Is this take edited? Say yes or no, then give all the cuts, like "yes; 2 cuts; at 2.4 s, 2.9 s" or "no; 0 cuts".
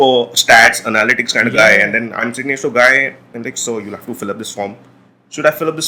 no; 0 cuts